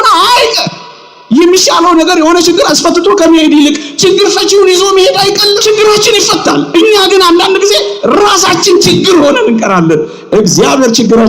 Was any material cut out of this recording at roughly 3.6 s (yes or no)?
no